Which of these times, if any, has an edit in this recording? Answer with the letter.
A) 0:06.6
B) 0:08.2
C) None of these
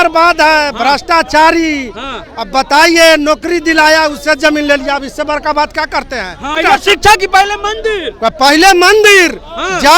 A